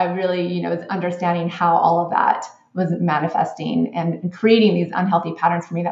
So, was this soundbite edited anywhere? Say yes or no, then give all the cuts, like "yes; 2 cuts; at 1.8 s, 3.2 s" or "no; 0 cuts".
no; 0 cuts